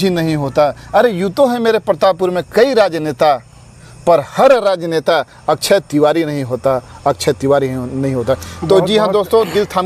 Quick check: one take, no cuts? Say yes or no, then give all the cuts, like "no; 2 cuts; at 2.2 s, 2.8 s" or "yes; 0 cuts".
yes; 0 cuts